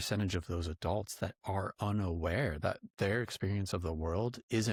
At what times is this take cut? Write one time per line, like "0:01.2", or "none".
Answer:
none

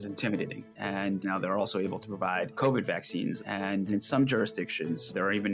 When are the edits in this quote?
0:00.8
0:03.6

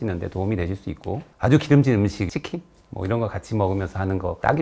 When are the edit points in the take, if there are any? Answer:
none

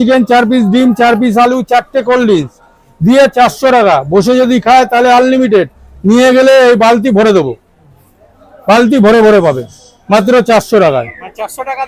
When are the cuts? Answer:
none

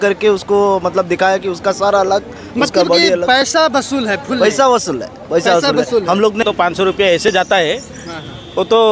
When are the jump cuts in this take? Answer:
0:06.4

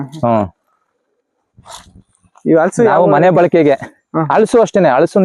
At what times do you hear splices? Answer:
none

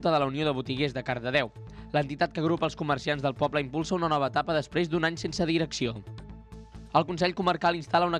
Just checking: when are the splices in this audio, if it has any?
none

